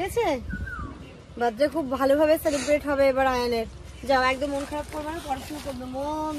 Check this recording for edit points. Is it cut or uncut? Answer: uncut